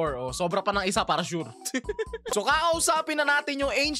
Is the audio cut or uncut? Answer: cut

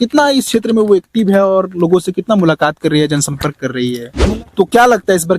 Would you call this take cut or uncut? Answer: cut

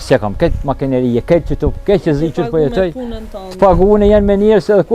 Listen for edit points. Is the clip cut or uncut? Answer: uncut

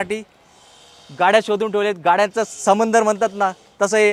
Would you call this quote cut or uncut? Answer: uncut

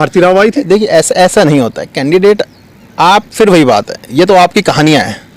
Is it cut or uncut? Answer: uncut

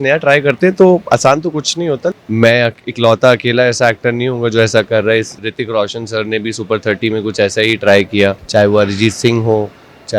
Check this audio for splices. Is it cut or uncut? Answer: cut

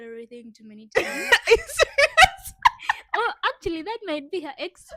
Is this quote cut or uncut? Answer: uncut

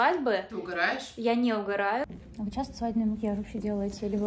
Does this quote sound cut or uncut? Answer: cut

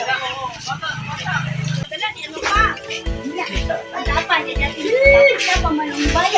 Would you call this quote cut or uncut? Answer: cut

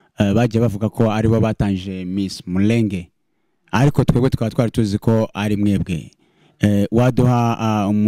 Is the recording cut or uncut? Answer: uncut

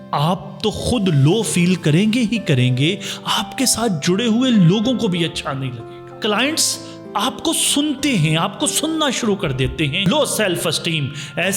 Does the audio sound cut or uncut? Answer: cut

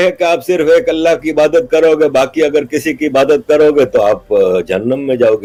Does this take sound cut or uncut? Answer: uncut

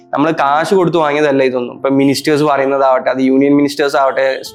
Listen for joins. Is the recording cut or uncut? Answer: uncut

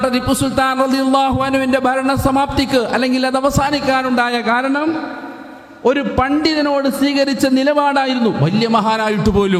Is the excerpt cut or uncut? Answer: uncut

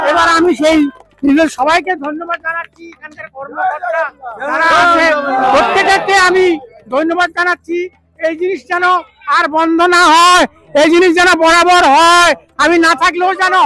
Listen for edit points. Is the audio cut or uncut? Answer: uncut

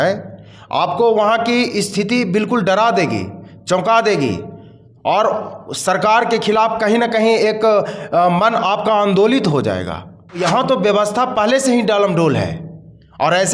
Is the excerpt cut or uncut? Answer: cut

